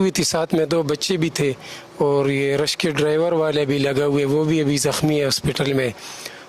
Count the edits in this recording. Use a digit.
0